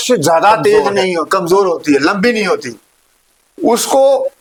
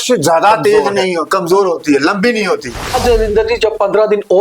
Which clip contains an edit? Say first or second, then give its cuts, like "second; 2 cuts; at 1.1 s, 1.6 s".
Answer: second; 1 cut; at 2.9 s